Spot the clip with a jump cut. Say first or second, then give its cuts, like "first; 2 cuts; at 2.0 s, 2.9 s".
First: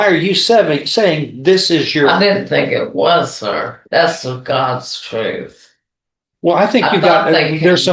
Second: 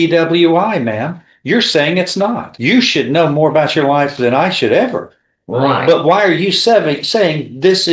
second; 1 cut; at 2.5 s